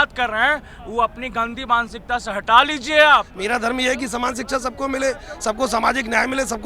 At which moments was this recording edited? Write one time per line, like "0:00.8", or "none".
0:03.3